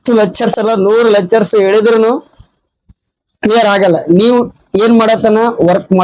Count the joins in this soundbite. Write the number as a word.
zero